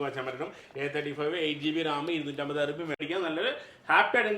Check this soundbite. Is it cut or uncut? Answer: cut